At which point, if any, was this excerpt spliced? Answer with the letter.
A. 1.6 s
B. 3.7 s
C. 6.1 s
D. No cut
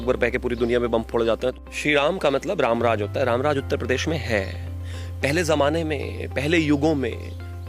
A